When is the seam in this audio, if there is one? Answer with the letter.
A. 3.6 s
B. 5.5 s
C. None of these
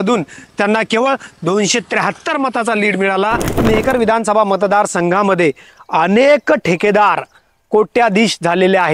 A